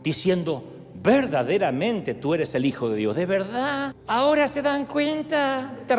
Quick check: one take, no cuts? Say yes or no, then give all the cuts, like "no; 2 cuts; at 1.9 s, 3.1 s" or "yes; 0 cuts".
yes; 0 cuts